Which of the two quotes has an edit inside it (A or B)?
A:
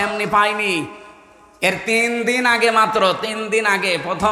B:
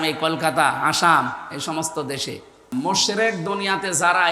B